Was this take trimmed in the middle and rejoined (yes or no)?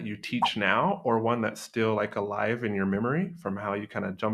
no